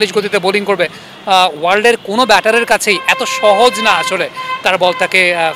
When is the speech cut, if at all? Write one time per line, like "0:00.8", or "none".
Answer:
none